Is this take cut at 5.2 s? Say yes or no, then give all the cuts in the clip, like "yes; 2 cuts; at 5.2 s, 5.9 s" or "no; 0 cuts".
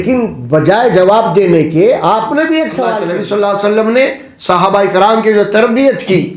no; 1 cut; at 3.0 s